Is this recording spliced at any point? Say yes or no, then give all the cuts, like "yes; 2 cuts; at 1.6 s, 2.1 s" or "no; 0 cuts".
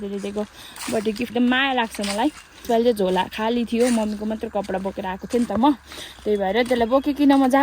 yes; 2 cuts; at 1.3 s, 2.6 s